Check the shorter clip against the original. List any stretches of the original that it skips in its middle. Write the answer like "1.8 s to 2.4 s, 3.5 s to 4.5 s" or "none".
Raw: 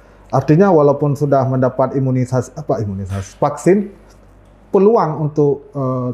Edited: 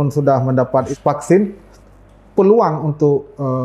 2.0 s to 3.3 s